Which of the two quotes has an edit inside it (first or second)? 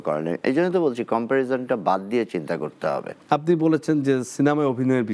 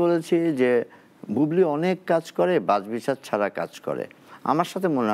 first